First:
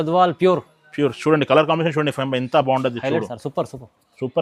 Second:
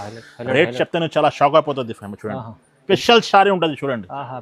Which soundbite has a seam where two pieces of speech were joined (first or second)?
second